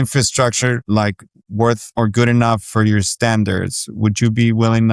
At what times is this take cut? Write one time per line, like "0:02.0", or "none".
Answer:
0:00.8
0:01.9